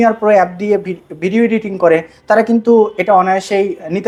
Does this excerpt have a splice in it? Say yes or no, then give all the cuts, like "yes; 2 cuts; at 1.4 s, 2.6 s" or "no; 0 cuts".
no; 0 cuts